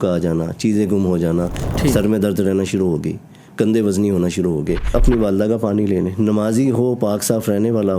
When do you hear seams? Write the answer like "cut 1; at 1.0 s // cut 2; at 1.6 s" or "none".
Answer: cut 1; at 1.6 s // cut 2; at 4.9 s

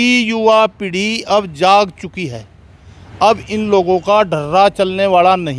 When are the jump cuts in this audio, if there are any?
none

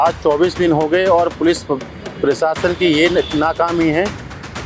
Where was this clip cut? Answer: none

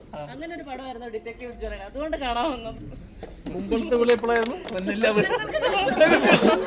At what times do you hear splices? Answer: none

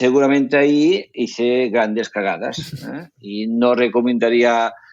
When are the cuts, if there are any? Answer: none

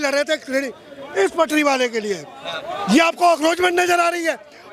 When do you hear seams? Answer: none

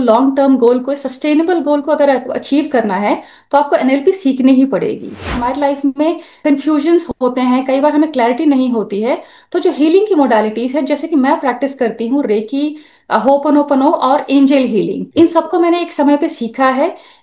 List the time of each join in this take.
cut 1; at 5.3 s // cut 2; at 6.4 s

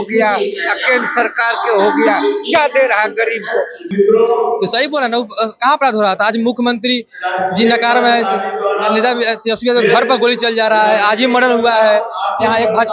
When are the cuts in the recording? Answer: cut 1; at 3.8 s

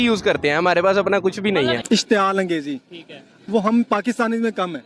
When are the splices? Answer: cut 1; at 1.8 s

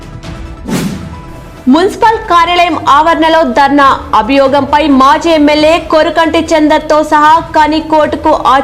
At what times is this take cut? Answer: cut 1; at 1.0 s

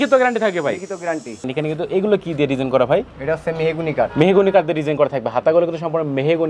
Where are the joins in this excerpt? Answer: cut 1; at 1.5 s // cut 2; at 3.1 s

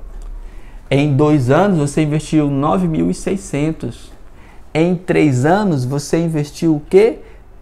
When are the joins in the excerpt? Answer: none

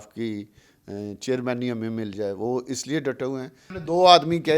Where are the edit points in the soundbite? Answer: cut 1; at 3.7 s

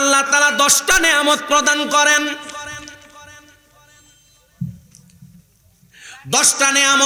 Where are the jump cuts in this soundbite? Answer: none

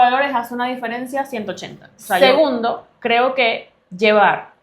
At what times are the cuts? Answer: cut 1; at 2.2 s

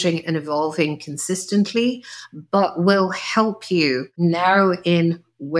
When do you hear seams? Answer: cut 1; at 4.1 s

